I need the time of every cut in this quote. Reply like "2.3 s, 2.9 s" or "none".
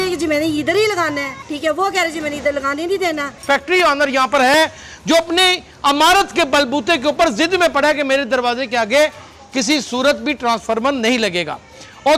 1.4 s, 3.4 s